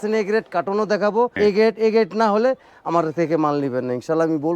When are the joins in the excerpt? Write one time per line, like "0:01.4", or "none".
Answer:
0:01.3